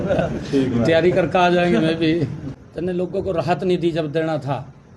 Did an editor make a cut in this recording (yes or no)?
yes